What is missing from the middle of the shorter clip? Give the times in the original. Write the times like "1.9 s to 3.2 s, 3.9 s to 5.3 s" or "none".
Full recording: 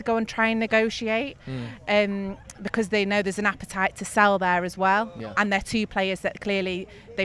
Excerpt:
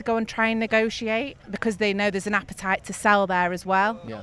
1.4 s to 2.5 s